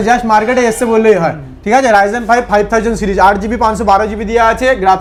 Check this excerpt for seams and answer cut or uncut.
uncut